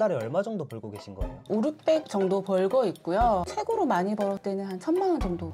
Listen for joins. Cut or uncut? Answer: uncut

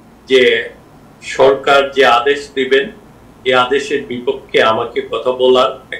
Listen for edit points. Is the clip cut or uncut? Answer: uncut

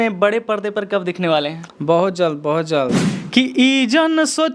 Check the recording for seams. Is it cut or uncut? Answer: cut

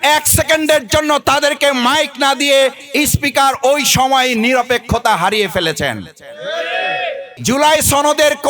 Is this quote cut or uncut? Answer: cut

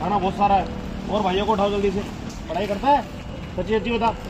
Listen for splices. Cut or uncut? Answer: cut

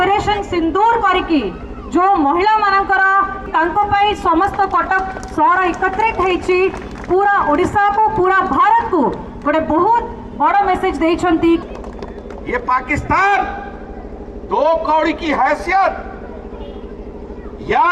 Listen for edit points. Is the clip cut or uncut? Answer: cut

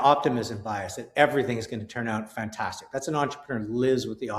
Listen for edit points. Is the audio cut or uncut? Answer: uncut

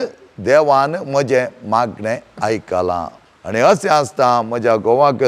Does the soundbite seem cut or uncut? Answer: cut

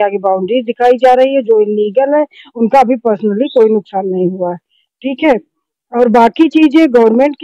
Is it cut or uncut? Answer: uncut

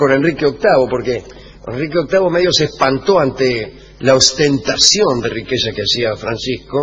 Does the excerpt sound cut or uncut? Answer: cut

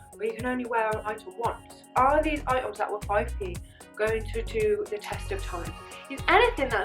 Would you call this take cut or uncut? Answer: cut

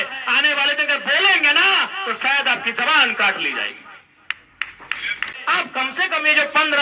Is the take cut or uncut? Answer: cut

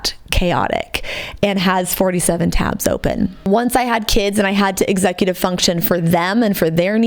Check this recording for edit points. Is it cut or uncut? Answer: cut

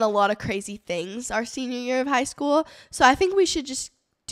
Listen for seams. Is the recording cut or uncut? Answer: uncut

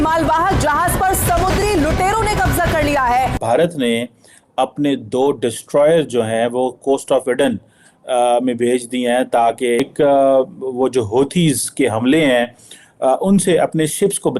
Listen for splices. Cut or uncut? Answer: cut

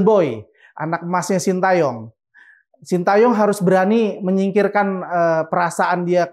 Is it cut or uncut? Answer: uncut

